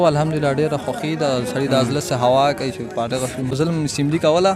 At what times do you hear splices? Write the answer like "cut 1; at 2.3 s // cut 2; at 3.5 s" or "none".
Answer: cut 1; at 3.5 s